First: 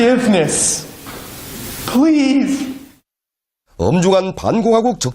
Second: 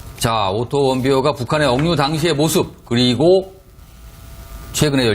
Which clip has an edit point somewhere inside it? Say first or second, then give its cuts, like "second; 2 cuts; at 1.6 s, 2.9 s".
second; 1 cut; at 3.4 s